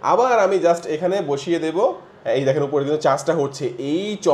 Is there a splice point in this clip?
no; 0 cuts

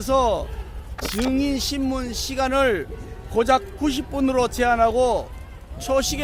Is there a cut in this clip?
no; 0 cuts

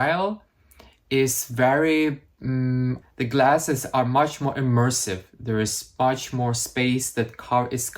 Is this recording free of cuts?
no; 1 cut; at 3.0 s

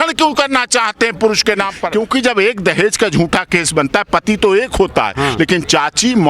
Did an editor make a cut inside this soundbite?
yes; 1 cut; at 1.8 s

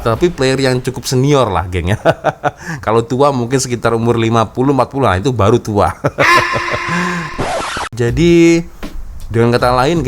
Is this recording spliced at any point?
yes; 1 cut; at 7.4 s

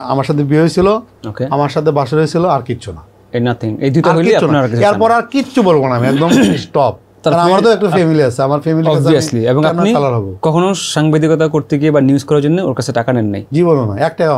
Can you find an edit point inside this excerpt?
no; 0 cuts

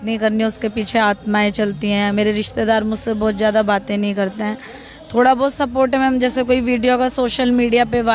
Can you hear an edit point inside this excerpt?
no; 0 cuts

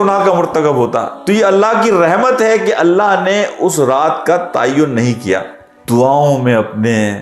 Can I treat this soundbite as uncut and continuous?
no; 1 cut; at 5.7 s

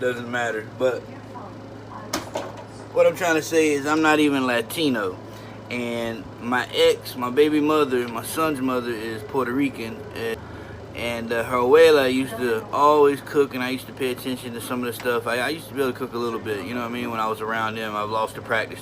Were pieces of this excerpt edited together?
yes; 1 cut; at 10.4 s

